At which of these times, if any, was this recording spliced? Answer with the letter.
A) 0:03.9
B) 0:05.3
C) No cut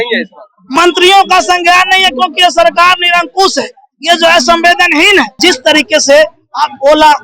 B